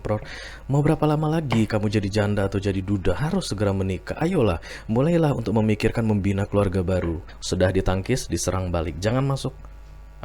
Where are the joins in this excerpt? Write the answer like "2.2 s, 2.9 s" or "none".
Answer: 7.3 s